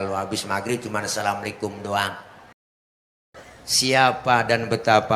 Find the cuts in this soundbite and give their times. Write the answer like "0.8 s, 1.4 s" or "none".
2.9 s